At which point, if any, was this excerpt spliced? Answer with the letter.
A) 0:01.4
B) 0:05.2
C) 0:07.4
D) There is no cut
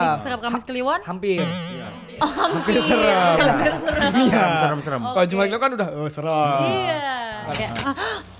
C